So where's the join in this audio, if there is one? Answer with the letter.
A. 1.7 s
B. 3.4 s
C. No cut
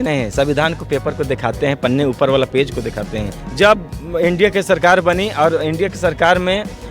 B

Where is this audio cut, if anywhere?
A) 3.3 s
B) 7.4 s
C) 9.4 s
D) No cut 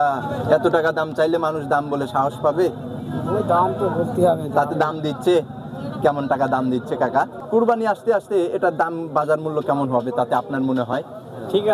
B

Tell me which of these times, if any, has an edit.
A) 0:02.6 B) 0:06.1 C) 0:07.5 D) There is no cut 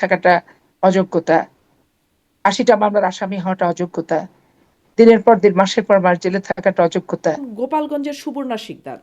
C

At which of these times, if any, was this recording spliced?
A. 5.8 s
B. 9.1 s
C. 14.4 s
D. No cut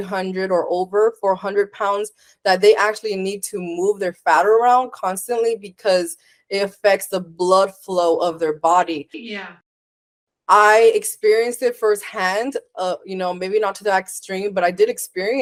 D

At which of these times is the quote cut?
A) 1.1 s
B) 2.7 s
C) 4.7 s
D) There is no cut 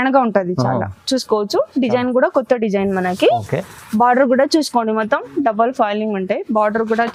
D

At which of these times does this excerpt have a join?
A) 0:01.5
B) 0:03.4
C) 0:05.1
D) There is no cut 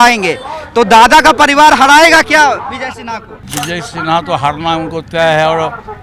B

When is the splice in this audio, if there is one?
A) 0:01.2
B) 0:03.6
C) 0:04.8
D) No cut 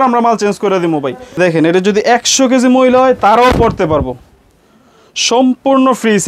A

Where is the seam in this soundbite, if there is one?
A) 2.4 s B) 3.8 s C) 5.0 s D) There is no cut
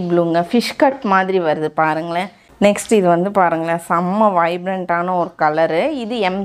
A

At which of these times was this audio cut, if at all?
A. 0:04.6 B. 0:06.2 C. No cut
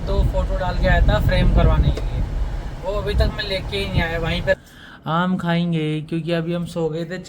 A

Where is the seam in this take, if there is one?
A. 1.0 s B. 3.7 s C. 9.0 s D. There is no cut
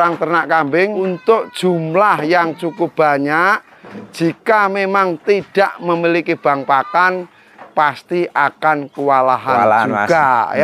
A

